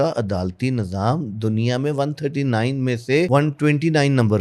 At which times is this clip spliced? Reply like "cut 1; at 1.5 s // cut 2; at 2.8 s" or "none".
cut 1; at 3.3 s